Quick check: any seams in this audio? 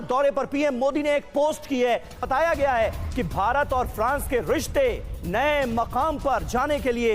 yes; 1 cut; at 2.2 s

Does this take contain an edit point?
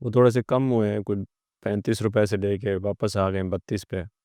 no; 0 cuts

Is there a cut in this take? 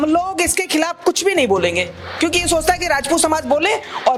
no; 0 cuts

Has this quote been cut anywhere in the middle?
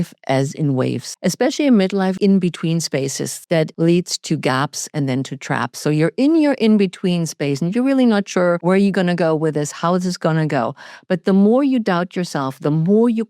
yes; 4 cuts; at 1.1 s, 2.2 s, 3.6 s, 8.6 s

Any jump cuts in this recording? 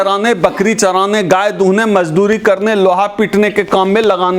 no; 0 cuts

